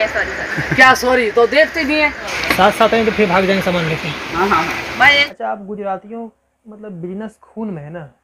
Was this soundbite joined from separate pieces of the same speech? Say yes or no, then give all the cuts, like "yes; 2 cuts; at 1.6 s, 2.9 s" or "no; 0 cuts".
yes; 2 cuts; at 2.3 s, 5.3 s